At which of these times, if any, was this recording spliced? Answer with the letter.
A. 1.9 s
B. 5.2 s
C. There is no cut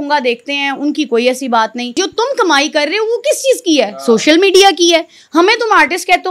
A